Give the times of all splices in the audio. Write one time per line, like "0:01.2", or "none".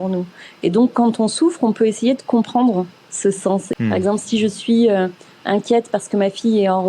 0:03.7